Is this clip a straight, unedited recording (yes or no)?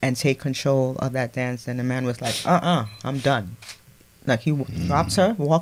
yes